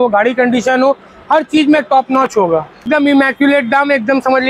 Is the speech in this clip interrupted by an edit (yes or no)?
yes